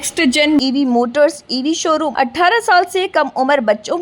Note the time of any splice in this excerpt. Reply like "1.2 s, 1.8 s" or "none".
2.1 s